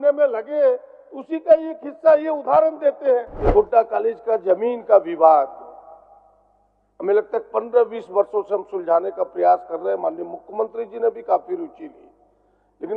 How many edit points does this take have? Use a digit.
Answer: 1